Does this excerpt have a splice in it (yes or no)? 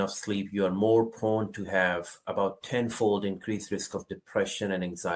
no